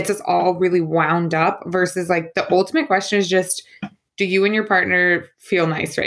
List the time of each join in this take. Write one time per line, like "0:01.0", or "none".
none